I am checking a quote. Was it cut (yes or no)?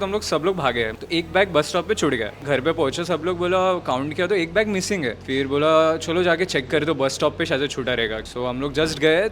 yes